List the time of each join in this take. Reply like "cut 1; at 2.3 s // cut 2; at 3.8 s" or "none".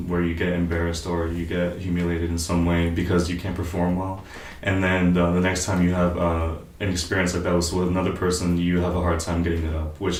none